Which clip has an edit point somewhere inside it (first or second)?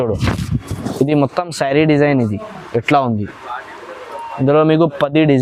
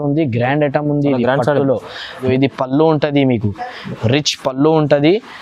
second